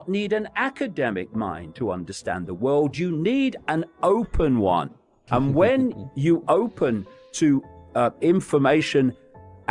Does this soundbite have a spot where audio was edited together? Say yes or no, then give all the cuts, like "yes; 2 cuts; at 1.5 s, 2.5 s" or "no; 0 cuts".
no; 0 cuts